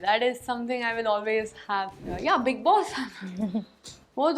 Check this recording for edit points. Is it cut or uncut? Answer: cut